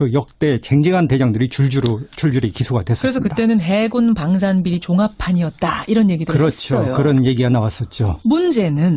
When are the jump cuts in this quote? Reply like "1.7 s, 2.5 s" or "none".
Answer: none